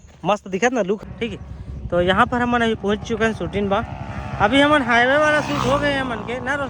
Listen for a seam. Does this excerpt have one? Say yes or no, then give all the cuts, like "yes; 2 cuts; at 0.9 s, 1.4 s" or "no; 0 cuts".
yes; 1 cut; at 1.1 s